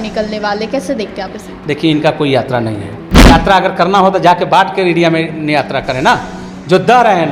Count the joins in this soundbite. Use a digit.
1